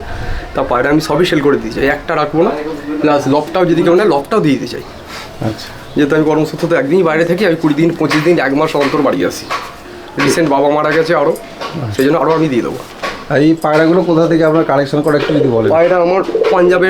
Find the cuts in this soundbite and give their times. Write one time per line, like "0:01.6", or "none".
none